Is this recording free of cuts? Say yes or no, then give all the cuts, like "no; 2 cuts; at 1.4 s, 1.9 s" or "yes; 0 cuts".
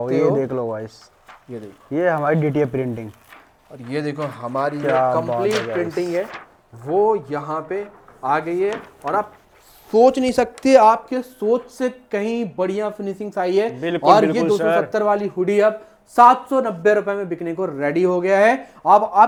yes; 0 cuts